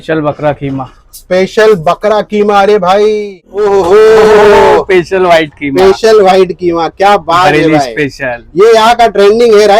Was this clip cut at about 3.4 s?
yes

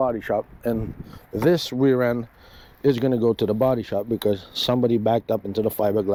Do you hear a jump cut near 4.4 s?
no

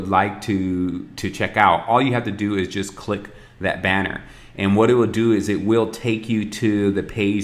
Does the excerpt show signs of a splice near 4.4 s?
no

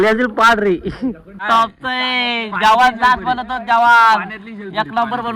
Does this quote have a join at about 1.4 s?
yes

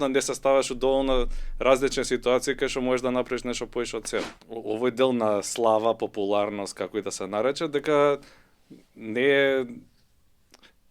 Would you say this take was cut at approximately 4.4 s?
yes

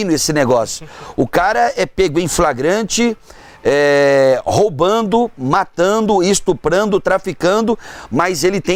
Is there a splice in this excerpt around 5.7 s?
no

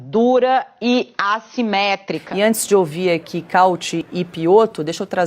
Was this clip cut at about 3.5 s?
no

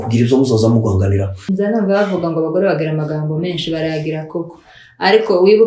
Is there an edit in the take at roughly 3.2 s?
no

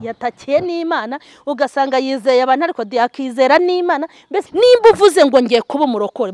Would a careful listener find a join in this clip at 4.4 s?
yes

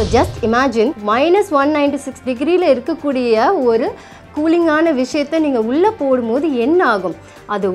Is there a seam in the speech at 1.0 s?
yes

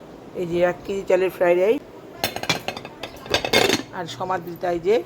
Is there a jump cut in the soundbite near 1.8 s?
yes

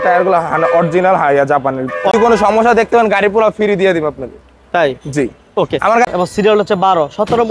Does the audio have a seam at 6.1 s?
yes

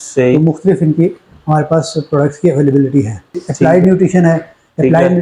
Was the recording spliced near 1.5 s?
no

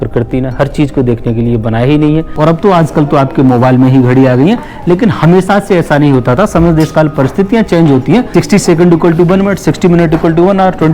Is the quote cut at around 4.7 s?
no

